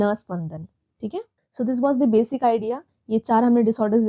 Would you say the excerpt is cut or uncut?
cut